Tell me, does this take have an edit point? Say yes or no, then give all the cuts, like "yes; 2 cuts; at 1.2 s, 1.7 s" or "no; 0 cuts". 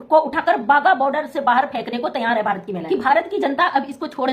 yes; 1 cut; at 2.8 s